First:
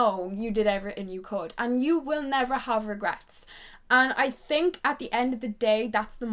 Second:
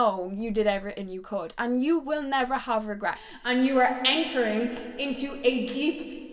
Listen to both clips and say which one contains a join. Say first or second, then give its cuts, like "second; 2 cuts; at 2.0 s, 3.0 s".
second; 1 cut; at 3.3 s